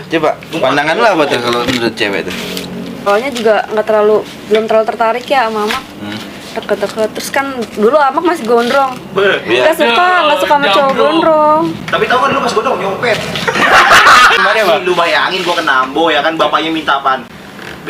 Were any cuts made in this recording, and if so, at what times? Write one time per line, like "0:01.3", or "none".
0:03.1
0:14.4